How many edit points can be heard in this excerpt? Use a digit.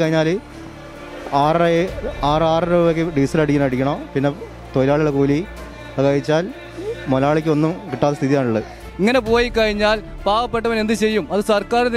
1